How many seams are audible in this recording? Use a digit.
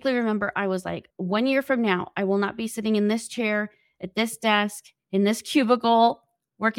1